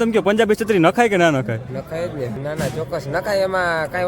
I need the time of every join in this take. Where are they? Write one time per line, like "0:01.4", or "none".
0:02.4